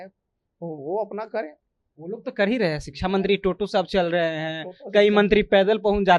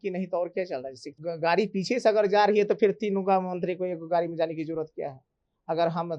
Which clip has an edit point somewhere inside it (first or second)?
second